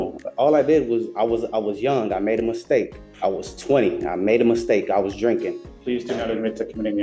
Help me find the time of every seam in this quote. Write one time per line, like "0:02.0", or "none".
0:03.0
0:05.7